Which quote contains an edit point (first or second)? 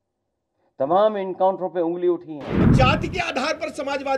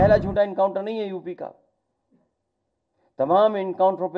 first